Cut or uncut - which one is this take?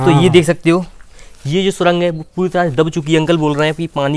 uncut